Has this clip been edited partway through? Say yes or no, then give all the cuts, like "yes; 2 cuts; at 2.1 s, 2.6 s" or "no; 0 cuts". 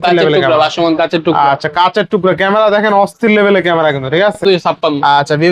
yes; 1 cut; at 4.4 s